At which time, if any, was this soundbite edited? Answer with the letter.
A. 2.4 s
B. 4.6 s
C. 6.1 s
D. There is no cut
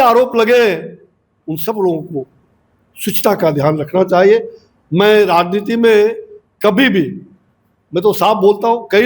D